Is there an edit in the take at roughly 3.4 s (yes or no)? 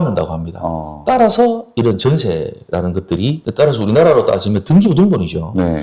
yes